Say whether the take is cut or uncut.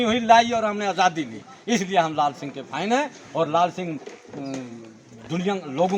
uncut